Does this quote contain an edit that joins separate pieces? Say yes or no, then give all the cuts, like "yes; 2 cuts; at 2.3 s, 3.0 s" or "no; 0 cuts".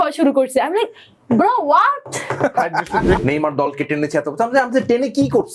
yes; 1 cut; at 3.2 s